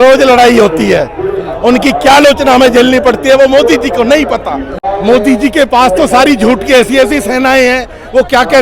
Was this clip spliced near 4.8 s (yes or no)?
yes